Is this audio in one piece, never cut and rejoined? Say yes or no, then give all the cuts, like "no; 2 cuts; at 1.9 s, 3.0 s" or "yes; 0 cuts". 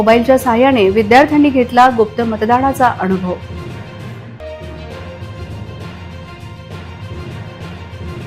yes; 0 cuts